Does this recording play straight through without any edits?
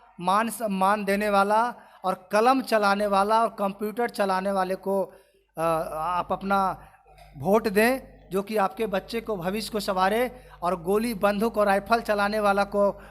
yes; 0 cuts

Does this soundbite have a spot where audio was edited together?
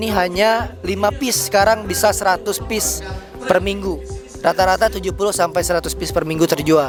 no; 0 cuts

